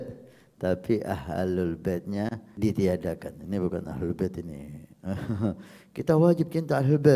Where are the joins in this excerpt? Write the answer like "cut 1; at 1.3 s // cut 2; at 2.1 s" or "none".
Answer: cut 1; at 2.4 s